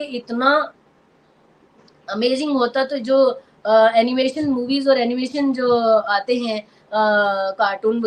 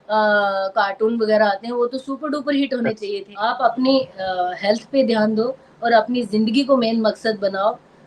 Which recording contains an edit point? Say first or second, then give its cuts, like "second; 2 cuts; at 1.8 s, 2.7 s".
second; 1 cut; at 3.3 s